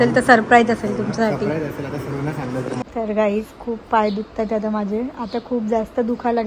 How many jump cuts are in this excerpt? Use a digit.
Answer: 1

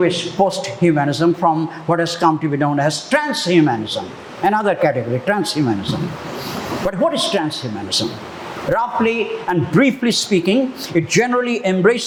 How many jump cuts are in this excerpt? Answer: 0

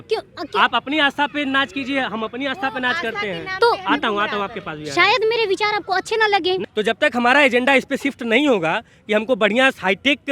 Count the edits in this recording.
1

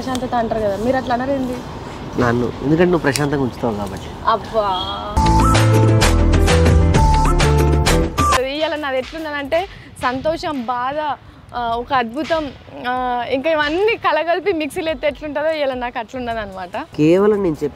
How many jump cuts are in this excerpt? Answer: 2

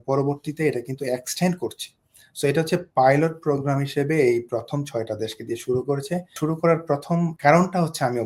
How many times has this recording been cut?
2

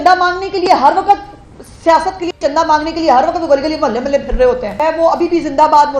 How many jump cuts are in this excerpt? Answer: 1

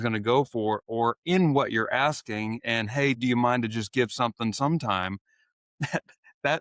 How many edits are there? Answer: 0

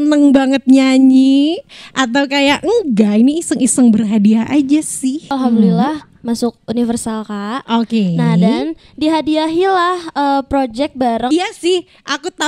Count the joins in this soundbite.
2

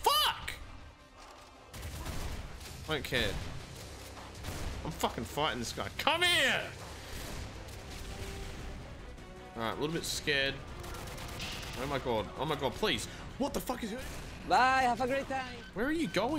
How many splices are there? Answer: 3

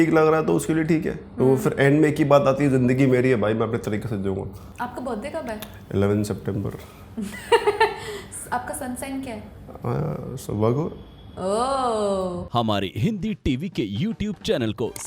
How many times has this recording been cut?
2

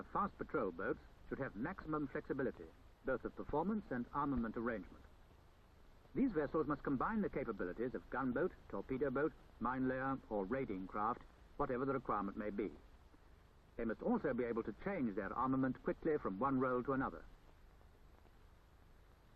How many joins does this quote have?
0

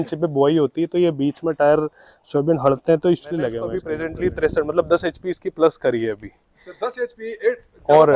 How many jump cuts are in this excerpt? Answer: 1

